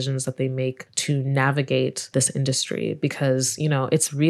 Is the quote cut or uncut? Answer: cut